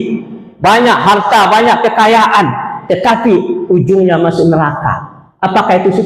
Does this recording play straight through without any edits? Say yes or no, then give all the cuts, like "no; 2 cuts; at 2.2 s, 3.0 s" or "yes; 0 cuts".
yes; 0 cuts